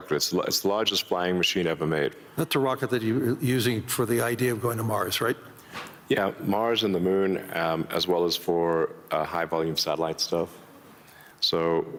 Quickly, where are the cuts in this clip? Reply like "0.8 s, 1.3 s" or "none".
none